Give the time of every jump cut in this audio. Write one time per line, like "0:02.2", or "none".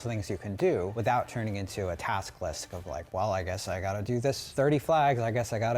0:00.9
0:04.4